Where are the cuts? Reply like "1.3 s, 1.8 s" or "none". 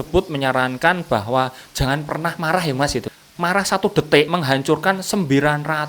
3.1 s, 4.3 s